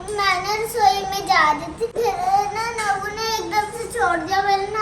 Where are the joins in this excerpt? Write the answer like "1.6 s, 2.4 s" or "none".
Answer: 1.9 s